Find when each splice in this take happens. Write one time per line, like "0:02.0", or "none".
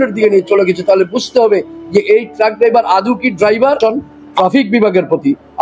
0:03.8